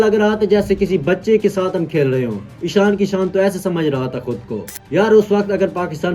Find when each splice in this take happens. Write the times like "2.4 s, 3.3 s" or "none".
4.7 s